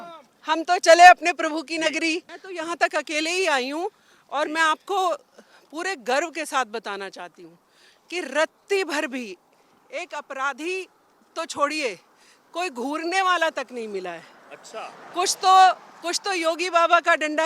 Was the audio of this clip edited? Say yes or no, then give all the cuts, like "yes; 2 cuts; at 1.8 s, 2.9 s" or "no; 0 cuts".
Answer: yes; 1 cut; at 2.4 s